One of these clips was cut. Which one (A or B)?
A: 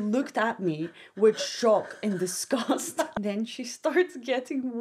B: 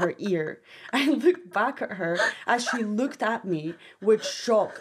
A